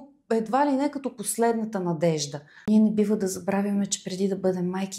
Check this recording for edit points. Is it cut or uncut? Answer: cut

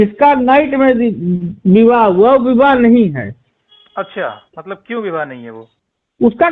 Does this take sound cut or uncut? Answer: uncut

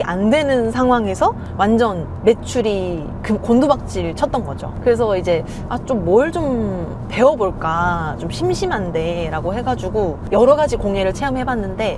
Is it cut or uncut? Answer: cut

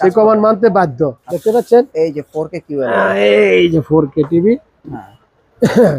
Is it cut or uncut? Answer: cut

